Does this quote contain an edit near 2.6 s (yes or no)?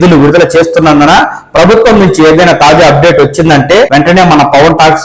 no